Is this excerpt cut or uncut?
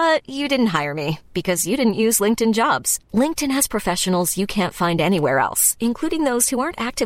uncut